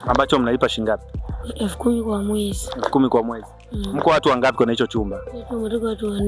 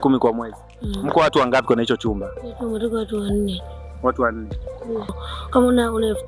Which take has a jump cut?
second; 1 cut; at 5.1 s

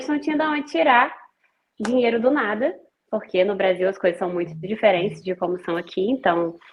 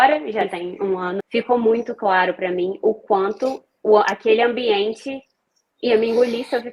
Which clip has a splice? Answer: second; 1 cut; at 1.2 s

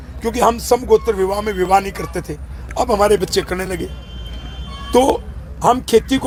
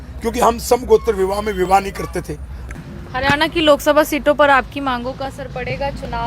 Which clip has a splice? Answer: second; 1 cut; at 2.7 s

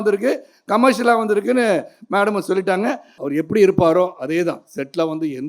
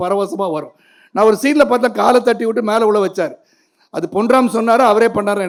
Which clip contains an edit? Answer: first; 1 cut; at 3.1 s

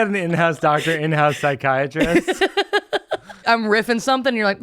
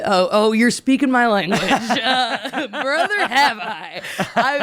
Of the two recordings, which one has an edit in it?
first; 1 cut; at 3.4 s

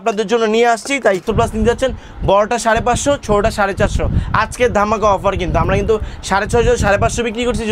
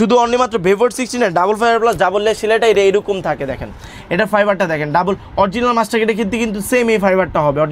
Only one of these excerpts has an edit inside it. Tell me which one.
first; 1 cut; at 1.2 s

